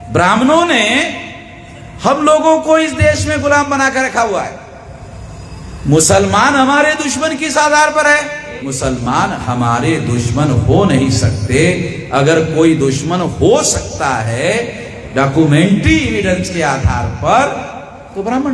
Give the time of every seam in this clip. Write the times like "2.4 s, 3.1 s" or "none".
8.5 s